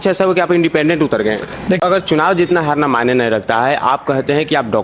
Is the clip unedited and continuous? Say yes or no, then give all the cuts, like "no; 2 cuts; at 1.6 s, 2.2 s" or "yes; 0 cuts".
no; 1 cut; at 1.8 s